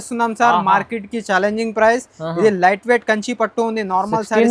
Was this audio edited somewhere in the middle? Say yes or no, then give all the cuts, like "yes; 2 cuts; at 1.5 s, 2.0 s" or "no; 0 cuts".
no; 0 cuts